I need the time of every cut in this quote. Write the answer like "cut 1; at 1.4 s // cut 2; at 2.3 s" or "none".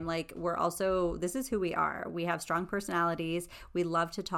none